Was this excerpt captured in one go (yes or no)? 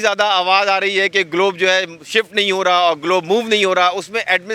yes